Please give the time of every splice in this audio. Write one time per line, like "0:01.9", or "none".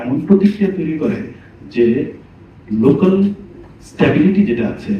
none